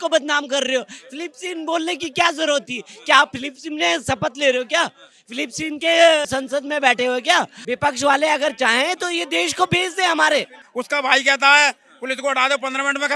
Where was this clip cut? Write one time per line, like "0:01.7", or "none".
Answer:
0:07.6
0:10.6